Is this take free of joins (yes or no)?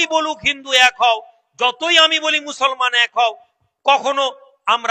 yes